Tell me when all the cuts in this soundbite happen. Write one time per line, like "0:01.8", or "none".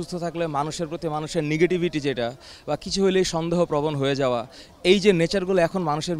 none